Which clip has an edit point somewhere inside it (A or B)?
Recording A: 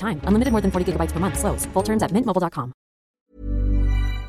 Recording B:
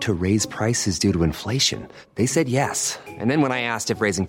A